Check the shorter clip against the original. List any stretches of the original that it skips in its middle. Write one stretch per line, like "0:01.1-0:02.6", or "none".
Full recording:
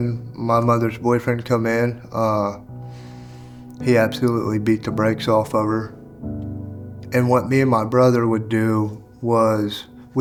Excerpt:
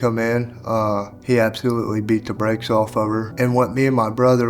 0:02.6-0:03.7
0:05.9-0:07.0

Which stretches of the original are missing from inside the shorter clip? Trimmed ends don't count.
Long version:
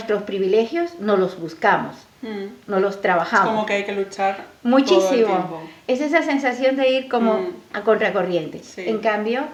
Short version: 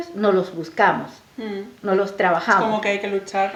none

